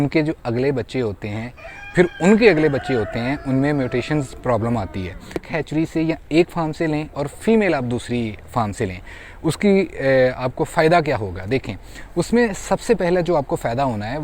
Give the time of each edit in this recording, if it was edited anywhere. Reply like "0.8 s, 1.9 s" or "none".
5.4 s